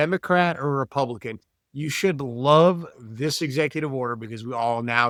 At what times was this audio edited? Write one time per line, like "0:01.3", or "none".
none